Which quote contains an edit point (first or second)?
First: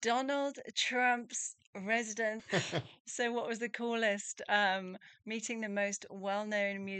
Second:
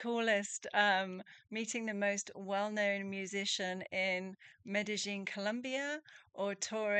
first